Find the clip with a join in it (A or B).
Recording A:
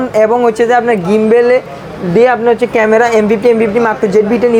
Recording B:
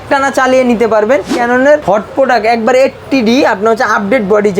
B